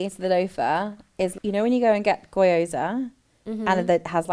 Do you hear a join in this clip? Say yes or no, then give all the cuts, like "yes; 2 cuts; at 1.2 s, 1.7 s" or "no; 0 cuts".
yes; 1 cut; at 1.3 s